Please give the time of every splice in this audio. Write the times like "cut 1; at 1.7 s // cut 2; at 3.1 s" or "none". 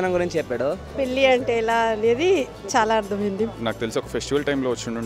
cut 1; at 0.9 s // cut 2; at 3.6 s

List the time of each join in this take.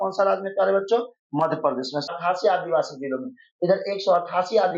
cut 1; at 2.1 s

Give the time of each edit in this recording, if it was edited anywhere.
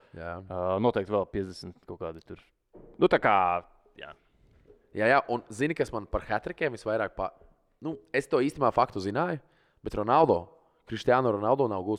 none

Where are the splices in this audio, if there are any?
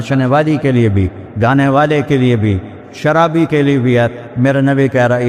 none

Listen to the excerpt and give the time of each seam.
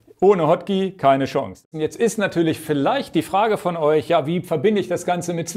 cut 1; at 1.6 s

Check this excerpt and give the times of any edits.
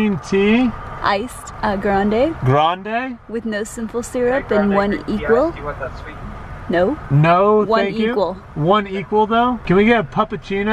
none

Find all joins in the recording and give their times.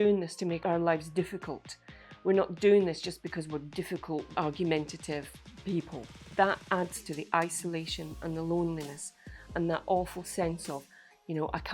cut 1; at 6.2 s

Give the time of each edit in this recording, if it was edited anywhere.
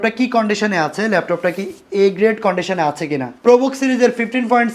cut 1; at 3.3 s

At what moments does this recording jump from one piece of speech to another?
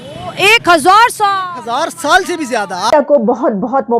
cut 1; at 2.9 s

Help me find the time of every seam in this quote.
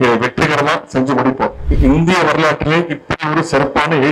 cut 1; at 1.6 s

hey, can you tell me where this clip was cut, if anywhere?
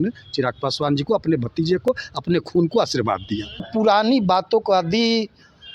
cut 1; at 3.7 s

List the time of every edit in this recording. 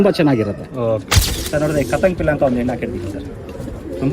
cut 1; at 1.3 s

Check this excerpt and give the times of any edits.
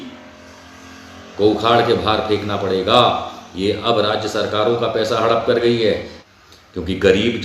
cut 1; at 6.1 s

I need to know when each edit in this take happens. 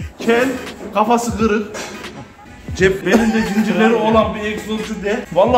none

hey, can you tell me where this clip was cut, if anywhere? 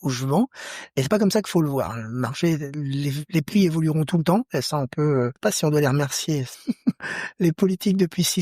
cut 1; at 5.3 s // cut 2; at 6.5 s

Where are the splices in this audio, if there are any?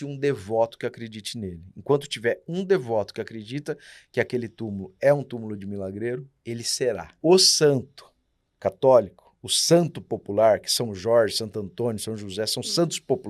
cut 1; at 7.1 s

